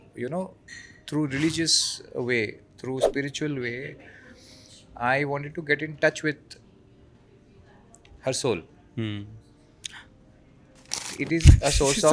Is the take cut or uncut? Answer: cut